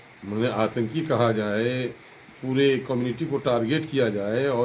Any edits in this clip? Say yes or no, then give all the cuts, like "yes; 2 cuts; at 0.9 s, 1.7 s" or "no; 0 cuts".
no; 0 cuts